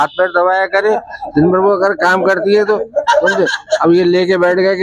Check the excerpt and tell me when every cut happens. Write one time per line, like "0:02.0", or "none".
none